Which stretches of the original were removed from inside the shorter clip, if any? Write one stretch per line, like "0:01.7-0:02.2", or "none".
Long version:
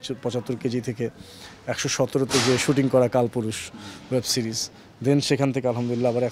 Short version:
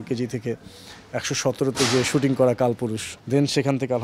0:03.6-0:04.8